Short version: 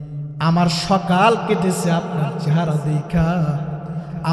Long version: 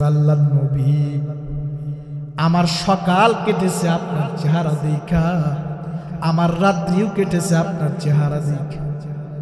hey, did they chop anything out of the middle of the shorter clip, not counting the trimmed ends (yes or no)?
no